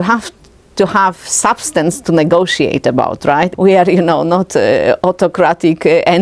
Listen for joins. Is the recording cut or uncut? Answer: cut